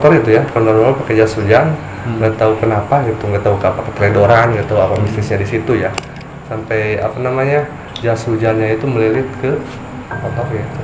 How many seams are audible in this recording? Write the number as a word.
zero